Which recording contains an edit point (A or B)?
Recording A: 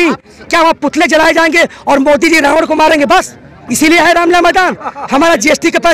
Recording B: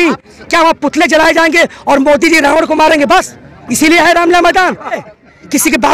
B